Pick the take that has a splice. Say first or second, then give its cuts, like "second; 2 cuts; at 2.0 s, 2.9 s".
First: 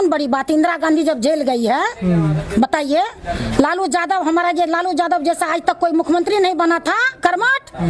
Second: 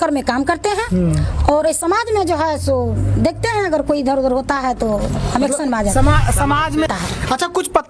second; 1 cut; at 6.9 s